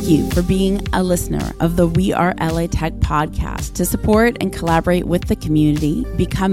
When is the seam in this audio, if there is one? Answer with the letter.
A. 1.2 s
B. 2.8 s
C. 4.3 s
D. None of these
D